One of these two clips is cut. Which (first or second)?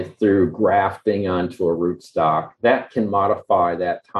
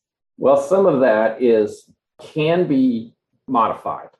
second